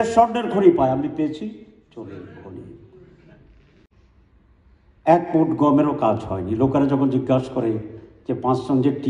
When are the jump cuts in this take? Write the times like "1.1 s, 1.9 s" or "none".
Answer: 3.9 s